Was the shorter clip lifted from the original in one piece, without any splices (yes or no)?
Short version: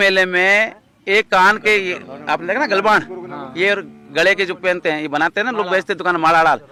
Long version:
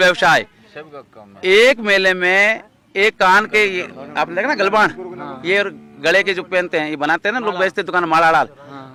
yes